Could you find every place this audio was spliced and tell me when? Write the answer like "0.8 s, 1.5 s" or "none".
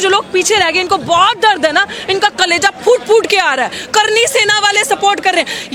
none